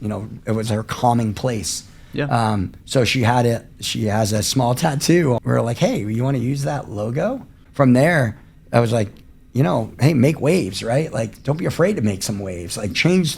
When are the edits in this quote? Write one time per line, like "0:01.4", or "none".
0:05.4
0:07.6